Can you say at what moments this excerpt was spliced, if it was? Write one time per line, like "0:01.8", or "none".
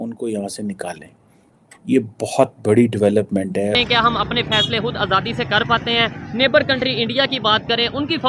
0:03.7